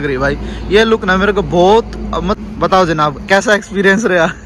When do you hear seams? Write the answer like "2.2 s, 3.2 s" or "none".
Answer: 2.3 s